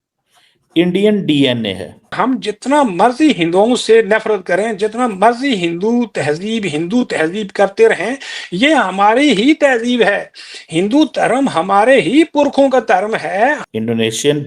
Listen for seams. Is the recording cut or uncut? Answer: cut